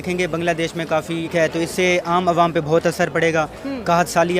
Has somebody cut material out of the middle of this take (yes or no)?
yes